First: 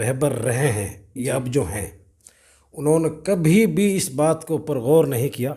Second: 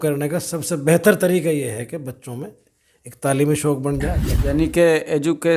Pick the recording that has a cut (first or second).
second